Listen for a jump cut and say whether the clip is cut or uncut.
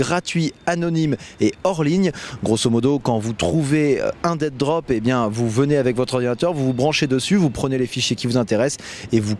cut